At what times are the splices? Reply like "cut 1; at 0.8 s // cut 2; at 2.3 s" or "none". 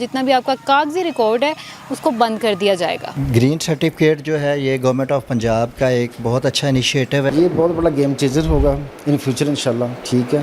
cut 1; at 3.1 s // cut 2; at 7.3 s